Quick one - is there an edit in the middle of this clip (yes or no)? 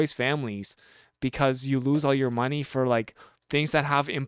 no